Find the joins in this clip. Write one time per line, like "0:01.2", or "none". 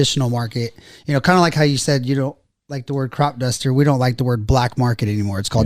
none